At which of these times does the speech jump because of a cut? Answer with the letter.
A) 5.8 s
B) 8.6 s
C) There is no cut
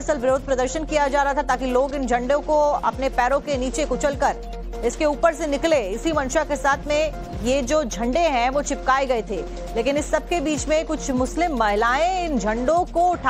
B